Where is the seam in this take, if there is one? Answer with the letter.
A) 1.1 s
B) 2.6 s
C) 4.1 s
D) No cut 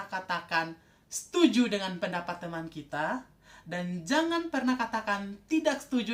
D